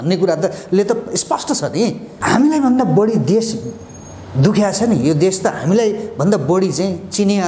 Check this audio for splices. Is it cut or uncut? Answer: cut